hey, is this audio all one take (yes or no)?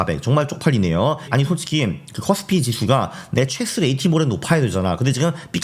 no